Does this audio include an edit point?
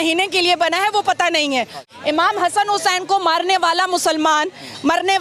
yes; 1 cut; at 1.9 s

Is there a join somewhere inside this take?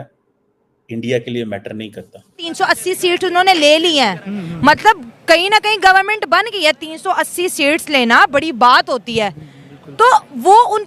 yes; 1 cut; at 2.4 s

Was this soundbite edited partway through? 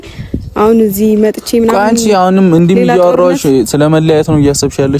no; 0 cuts

